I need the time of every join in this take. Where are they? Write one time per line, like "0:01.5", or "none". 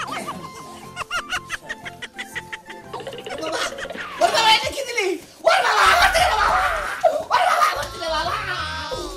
none